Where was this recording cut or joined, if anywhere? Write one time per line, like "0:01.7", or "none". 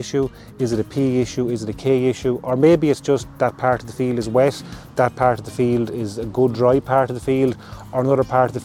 none